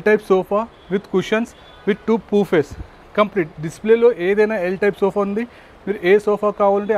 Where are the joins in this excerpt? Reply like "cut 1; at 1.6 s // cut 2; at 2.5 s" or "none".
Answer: none